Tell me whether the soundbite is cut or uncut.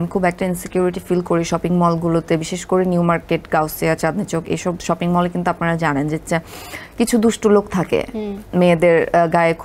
uncut